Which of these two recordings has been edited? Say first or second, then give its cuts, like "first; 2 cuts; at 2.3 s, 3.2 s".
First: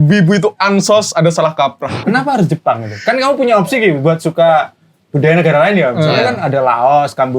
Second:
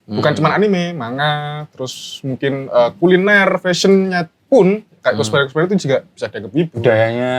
first; 1 cut; at 2.0 s